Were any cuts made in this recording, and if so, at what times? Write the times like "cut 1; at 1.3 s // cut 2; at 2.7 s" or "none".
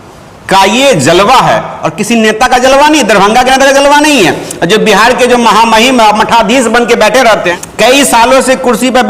cut 1; at 7.5 s